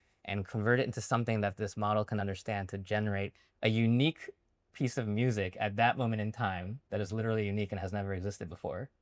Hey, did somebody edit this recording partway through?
no; 0 cuts

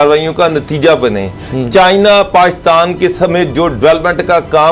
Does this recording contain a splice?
no; 0 cuts

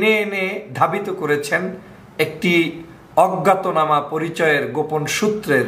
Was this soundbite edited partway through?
no; 0 cuts

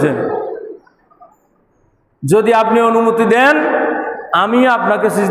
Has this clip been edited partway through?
no; 0 cuts

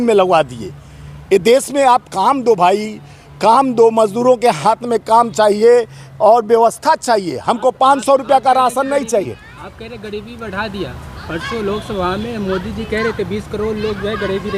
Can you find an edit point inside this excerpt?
no; 0 cuts

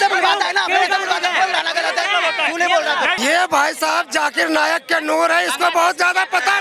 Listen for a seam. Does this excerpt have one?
yes; 1 cut; at 3.2 s

